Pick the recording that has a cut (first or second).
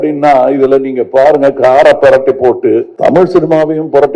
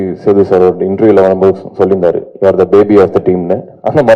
first